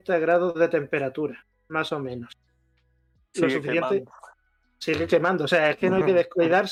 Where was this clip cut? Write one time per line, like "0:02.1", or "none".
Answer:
none